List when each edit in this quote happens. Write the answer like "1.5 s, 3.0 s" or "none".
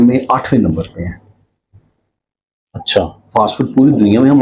none

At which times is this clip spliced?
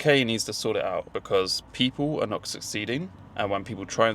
1.1 s

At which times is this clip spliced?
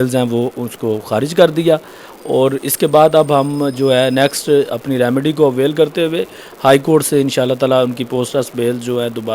none

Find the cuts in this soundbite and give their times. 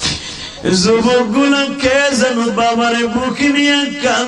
none

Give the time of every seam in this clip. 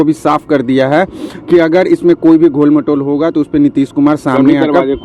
none

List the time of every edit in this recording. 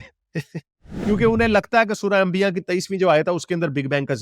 1.0 s

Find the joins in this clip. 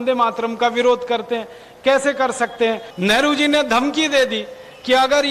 2.9 s

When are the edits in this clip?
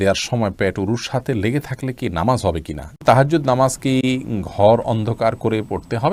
3.0 s

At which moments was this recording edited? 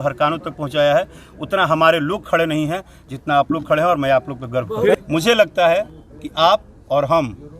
4.9 s

